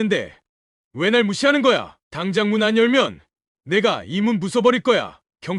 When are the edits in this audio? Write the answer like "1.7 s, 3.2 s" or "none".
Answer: 1.9 s